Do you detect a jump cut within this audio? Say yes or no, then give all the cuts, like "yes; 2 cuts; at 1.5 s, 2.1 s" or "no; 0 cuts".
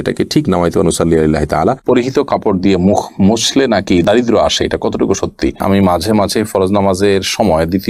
yes; 2 cuts; at 1.8 s, 5.6 s